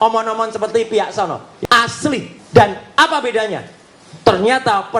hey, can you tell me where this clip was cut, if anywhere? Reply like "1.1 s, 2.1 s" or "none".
1.5 s

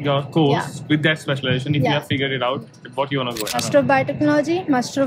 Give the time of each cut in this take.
3.5 s

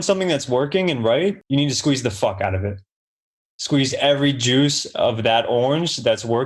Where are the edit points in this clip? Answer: 1.4 s

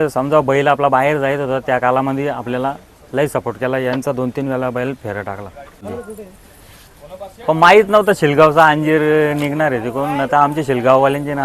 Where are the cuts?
5.8 s

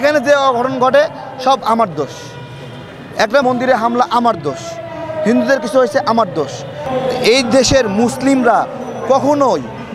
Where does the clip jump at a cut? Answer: 3.4 s, 6.8 s

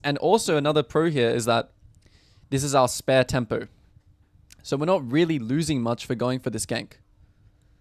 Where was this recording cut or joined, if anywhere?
none

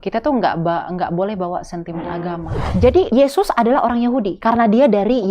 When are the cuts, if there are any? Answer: 2.9 s, 4.3 s

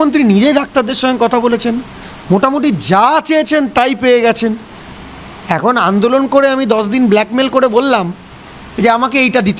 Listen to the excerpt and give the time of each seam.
none

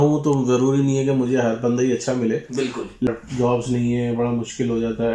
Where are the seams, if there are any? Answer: 3.1 s

